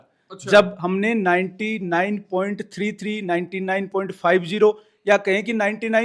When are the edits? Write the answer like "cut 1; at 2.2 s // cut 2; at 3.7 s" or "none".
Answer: none